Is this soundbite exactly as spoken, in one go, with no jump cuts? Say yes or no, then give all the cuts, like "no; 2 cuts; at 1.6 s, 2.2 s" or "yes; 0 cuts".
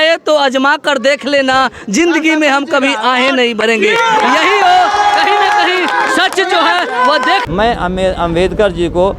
no; 1 cut; at 7.4 s